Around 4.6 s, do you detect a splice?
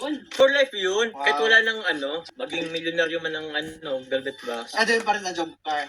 yes; 2 cuts; at 2.2 s, 4.6 s

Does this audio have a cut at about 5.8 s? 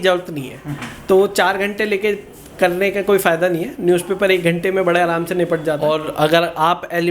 yes; 1 cut; at 5.8 s

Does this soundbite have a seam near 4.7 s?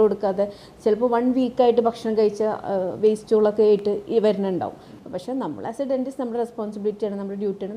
no; 0 cuts

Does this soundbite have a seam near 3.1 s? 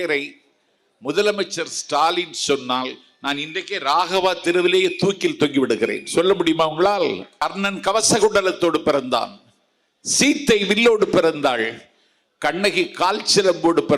no; 1 cut; at 7.3 s

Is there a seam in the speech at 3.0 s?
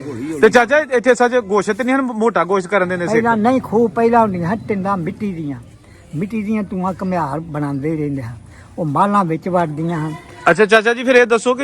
yes; 2 cuts; at 3.0 s, 10.3 s

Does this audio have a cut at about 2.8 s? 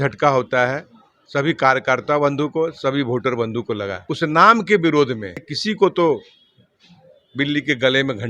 no; 2 cuts; at 4.0 s, 5.5 s

